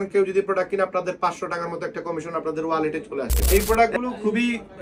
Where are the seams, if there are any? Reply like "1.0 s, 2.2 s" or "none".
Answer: 3.4 s